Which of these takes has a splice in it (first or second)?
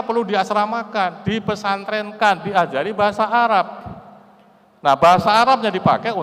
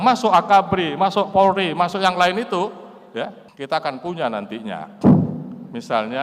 second